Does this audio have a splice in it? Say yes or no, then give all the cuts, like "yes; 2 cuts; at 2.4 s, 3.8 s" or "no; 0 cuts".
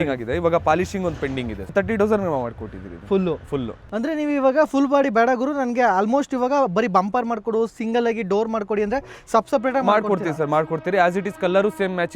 yes; 2 cuts; at 1.7 s, 3.8 s